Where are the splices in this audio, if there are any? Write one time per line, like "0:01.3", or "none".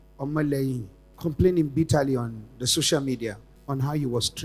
none